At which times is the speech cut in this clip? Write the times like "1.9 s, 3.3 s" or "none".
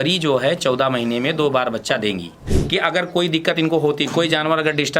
2.3 s